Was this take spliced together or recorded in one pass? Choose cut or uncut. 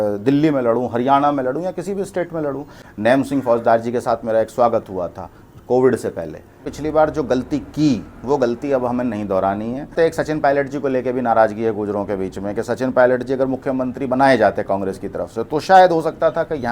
cut